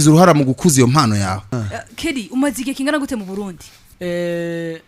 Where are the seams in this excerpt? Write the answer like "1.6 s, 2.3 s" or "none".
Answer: 1.5 s